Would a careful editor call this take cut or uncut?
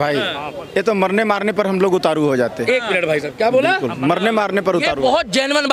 uncut